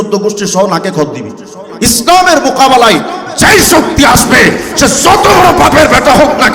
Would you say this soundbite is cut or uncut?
cut